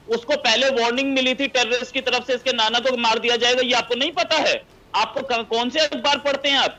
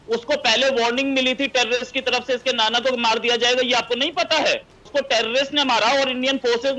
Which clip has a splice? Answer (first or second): second